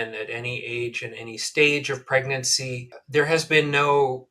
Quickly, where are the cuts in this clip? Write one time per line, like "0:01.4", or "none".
0:03.0